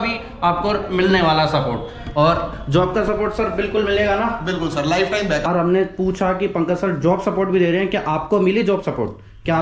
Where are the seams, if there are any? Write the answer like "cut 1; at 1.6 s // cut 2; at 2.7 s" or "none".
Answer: cut 1; at 5.4 s